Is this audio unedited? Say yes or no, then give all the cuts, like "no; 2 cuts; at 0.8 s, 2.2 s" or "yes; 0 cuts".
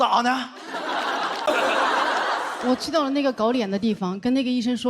no; 1 cut; at 1.5 s